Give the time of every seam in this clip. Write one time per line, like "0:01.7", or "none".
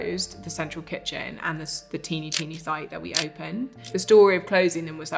0:03.9